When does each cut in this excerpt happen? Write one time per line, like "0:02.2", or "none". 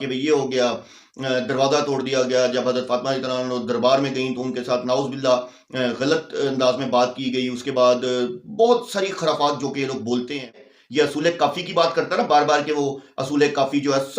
0:10.7